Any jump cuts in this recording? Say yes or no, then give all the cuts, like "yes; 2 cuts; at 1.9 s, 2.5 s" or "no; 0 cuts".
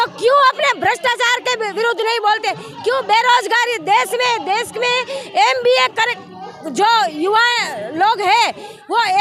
no; 0 cuts